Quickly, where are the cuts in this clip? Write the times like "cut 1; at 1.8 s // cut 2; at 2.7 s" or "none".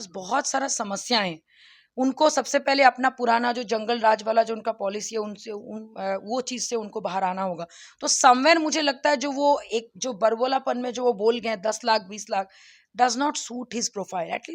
none